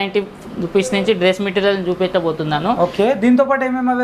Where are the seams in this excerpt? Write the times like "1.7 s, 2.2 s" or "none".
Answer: none